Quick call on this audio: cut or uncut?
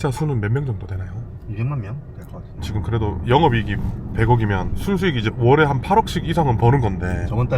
cut